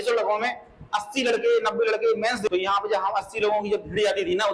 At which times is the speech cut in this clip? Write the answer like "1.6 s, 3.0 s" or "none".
2.5 s